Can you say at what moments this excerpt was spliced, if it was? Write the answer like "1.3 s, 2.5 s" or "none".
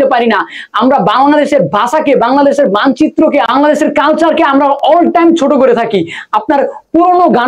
3.5 s